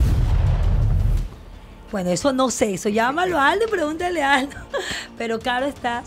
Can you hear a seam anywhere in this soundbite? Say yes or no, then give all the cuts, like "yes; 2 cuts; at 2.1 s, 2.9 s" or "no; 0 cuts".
no; 0 cuts